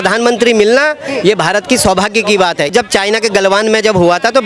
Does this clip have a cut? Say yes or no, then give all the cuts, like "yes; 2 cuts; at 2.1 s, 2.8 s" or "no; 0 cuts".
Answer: yes; 1 cut; at 2.7 s